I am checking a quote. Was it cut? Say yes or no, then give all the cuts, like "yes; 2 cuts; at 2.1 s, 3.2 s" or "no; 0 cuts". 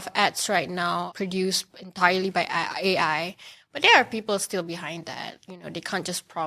yes; 1 cut; at 1.1 s